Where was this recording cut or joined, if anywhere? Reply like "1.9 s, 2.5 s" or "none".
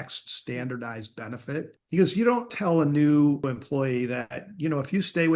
1.8 s, 2.5 s, 3.4 s